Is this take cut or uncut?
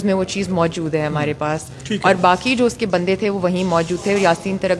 uncut